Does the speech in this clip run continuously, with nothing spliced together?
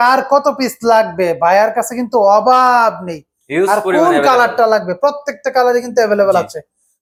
yes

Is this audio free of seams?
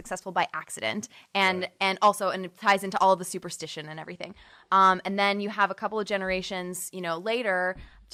yes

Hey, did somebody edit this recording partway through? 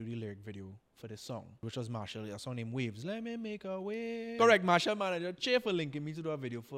yes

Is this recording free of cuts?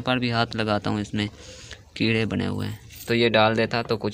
no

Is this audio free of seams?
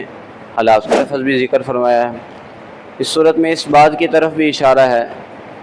no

